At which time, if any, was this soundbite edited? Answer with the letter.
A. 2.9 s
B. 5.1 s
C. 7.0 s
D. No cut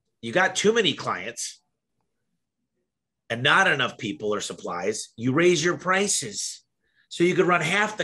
D